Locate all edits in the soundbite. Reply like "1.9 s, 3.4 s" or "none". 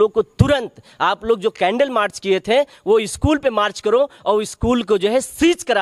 none